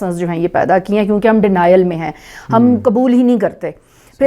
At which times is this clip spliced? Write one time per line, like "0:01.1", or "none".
none